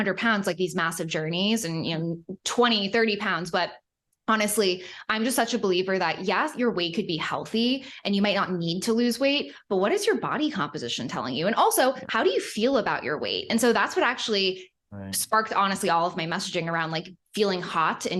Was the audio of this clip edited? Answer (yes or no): no